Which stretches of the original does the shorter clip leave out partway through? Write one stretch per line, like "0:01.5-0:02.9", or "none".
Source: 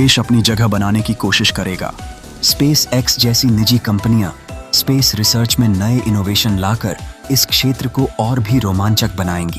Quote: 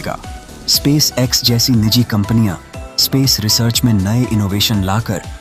none